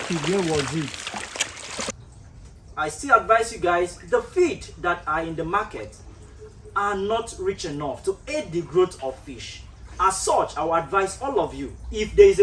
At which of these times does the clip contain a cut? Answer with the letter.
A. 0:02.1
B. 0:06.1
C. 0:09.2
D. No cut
A